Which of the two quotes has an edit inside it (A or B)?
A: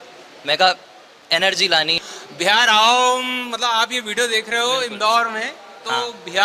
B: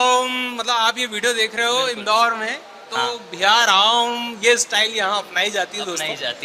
A